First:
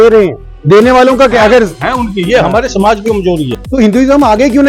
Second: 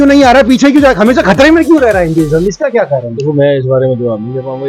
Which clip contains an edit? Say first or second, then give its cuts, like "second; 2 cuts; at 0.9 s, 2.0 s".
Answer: first; 1 cut; at 3.5 s